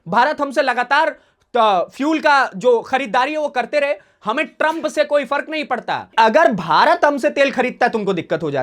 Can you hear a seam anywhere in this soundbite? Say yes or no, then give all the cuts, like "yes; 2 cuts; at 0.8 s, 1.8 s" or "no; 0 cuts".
yes; 1 cut; at 6.1 s